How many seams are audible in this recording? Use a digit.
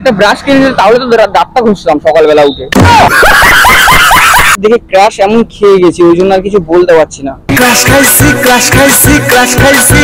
2